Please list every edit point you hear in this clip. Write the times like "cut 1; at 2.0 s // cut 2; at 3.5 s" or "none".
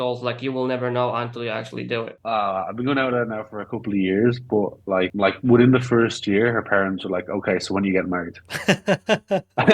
cut 1; at 2.1 s // cut 2; at 5.1 s